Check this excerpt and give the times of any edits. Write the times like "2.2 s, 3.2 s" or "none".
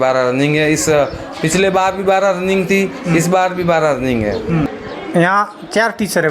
4.7 s